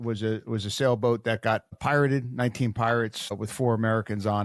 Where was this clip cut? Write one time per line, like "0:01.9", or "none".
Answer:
0:01.8
0:03.3